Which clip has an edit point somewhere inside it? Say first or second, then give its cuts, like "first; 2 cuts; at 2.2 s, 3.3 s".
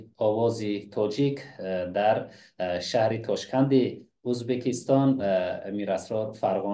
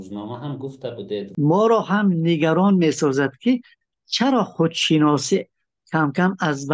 second; 1 cut; at 1.2 s